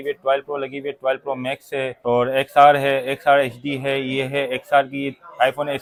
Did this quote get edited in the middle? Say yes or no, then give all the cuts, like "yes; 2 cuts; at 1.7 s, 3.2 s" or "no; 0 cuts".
no; 0 cuts